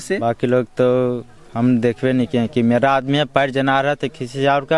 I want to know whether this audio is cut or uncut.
uncut